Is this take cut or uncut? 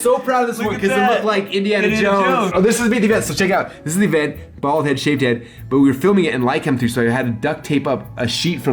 cut